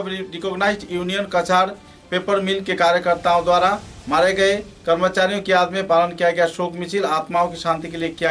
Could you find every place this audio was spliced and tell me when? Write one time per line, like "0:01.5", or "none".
none